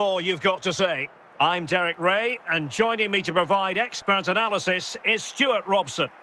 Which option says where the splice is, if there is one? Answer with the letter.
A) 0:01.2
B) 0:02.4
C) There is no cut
A